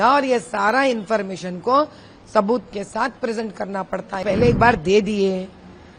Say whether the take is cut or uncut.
cut